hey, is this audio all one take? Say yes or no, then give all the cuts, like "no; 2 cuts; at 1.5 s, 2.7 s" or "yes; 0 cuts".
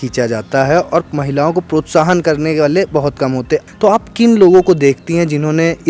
no; 1 cut; at 3.7 s